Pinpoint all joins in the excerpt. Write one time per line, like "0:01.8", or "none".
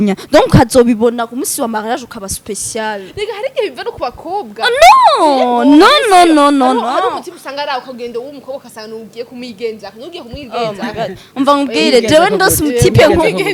none

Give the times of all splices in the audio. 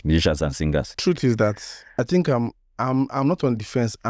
0:00.9
0:01.7

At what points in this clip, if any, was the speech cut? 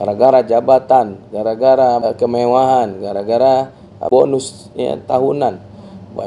0:02.0
0:04.1

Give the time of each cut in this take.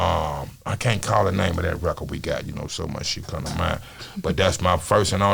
0:04.0

